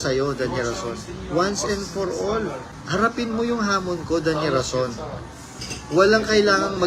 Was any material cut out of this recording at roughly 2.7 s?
yes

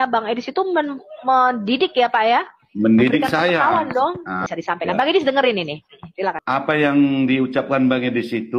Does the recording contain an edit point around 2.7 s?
no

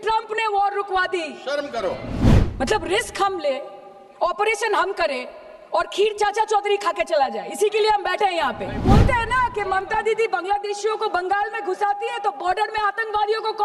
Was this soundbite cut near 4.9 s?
no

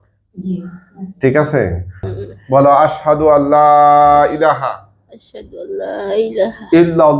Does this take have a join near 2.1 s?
yes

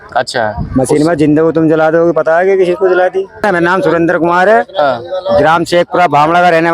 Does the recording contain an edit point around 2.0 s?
no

